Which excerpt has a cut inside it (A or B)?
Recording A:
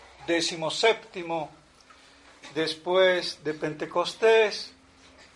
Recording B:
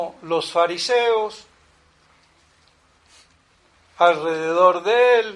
A